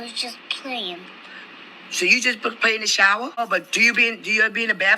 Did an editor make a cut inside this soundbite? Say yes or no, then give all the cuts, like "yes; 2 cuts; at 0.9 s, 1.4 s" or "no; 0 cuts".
yes; 1 cut; at 3.4 s